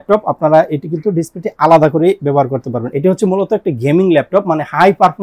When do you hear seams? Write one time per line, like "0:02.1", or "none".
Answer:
0:02.9